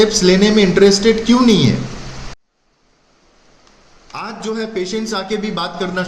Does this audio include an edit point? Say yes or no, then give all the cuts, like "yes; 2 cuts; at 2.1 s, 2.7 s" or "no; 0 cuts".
yes; 1 cut; at 2.3 s